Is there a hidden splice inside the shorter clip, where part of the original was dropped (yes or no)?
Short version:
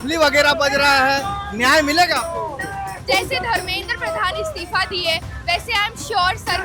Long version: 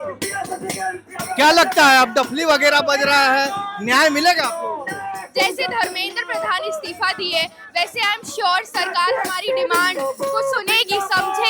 no